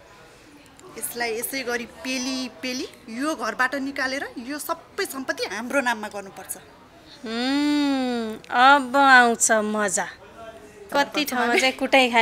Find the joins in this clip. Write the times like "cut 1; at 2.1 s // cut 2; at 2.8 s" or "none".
cut 1; at 10.9 s